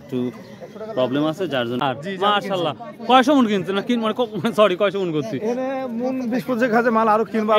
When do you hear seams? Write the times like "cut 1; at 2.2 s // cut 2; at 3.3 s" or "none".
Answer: cut 1; at 1.8 s